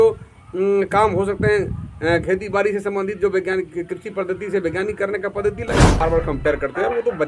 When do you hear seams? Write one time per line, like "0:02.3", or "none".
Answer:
0:06.0